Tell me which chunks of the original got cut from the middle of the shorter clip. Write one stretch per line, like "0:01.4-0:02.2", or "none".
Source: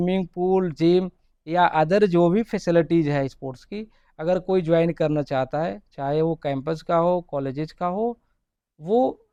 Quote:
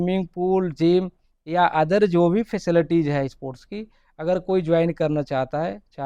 none